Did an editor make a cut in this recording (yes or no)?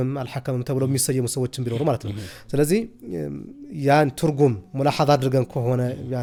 no